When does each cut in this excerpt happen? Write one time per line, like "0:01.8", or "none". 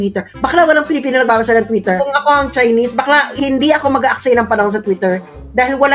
0:02.0
0:03.3

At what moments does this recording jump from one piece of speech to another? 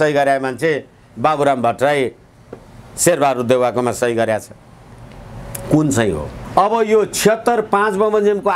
0:06.3

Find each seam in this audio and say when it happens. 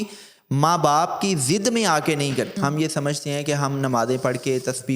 0:02.5

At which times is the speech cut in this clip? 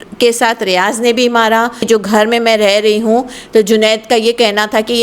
0:01.8

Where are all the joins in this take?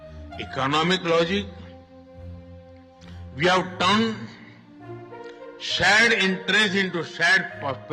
0:01.8
0:03.3

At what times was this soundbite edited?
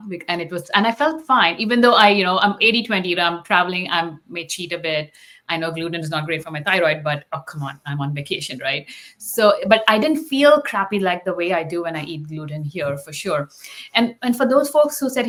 none

